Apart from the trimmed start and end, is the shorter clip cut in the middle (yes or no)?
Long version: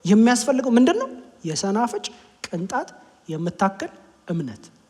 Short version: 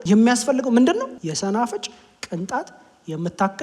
yes